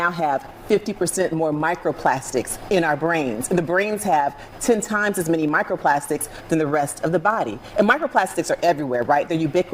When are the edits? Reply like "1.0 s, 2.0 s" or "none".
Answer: none